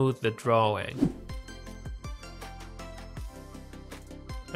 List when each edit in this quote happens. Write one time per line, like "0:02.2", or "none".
0:01.0